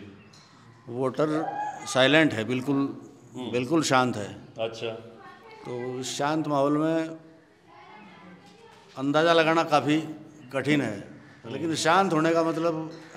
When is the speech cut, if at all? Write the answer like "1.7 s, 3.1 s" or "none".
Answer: none